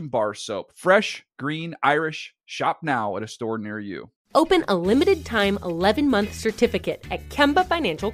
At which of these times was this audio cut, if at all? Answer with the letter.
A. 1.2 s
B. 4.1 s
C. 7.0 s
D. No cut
B